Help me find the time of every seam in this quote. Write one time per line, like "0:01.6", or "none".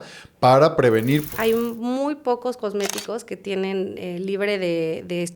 0:01.3